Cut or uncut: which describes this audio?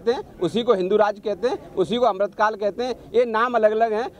uncut